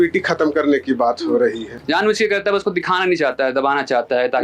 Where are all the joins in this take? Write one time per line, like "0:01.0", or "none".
0:01.7